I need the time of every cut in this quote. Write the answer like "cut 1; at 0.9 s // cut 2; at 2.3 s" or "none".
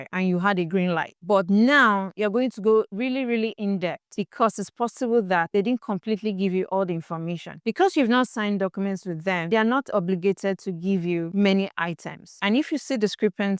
cut 1; at 8.3 s // cut 2; at 12.3 s

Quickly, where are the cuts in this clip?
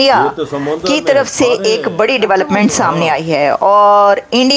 none

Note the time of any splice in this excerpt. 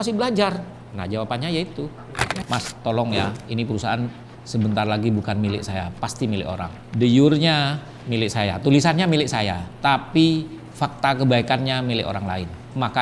cut 1; at 2.4 s

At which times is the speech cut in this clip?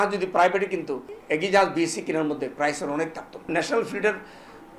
cut 1; at 1.1 s // cut 2; at 3.5 s

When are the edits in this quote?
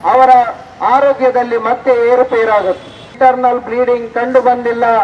cut 1; at 3.0 s

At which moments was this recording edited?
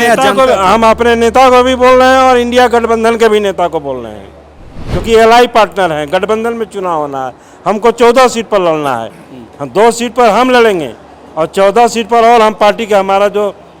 none

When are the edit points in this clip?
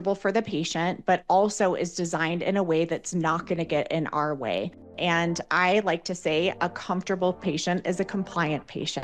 cut 1; at 4.9 s

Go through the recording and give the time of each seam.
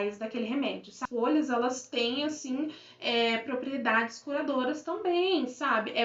cut 1; at 1.0 s

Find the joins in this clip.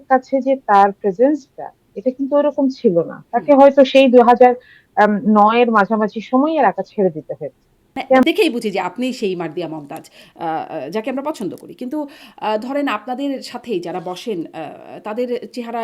cut 1; at 8.2 s

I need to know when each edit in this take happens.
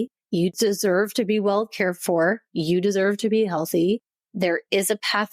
cut 1; at 4.2 s

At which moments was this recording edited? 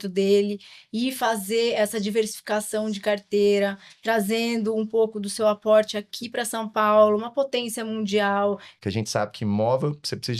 cut 1; at 8.7 s

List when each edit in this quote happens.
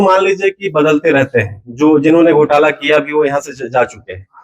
none

